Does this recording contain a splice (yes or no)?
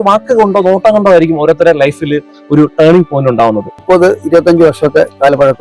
yes